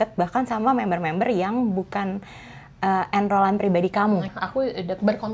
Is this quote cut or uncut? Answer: cut